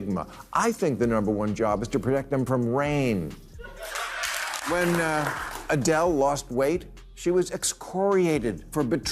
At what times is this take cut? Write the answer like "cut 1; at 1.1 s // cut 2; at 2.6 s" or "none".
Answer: cut 1; at 4.6 s